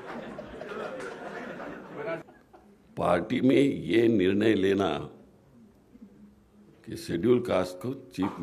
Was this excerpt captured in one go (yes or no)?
no